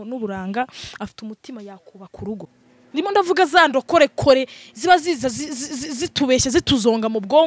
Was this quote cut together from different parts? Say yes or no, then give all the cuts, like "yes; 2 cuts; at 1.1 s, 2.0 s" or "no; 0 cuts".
yes; 1 cut; at 2.6 s